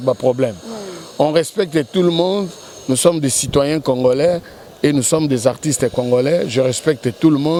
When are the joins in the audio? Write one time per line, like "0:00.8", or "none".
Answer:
none